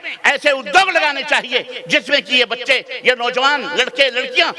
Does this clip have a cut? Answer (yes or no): no